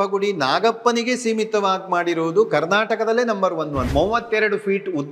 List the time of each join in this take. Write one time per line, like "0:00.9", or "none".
0:03.8

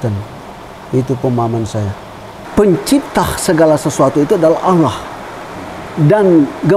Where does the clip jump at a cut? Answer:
0:02.3

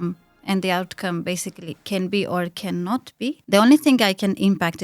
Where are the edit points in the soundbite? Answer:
0:03.4

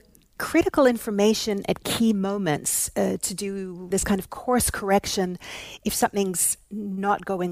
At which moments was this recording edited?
0:03.9

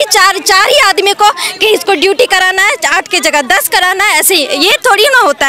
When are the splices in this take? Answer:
none

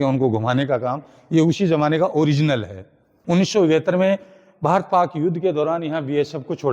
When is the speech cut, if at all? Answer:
0:03.1

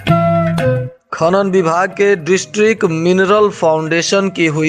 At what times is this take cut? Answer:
0:00.9

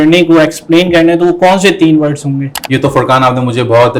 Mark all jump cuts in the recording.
0:02.5

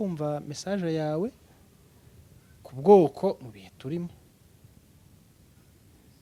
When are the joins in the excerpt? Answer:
none

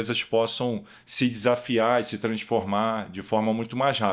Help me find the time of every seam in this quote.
none

